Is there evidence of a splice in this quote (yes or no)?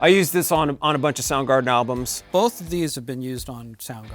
yes